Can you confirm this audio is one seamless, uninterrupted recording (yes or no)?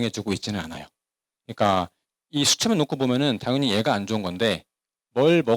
yes